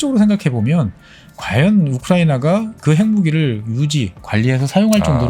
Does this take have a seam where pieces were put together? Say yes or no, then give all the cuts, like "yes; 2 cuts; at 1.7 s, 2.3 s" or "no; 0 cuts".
yes; 1 cut; at 2.7 s